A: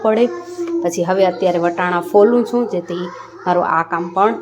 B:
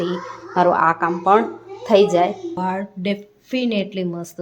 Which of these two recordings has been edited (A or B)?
B